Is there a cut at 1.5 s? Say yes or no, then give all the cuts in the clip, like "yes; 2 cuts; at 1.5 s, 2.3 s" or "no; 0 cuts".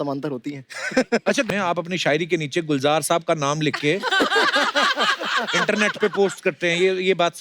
yes; 1 cut; at 1.5 s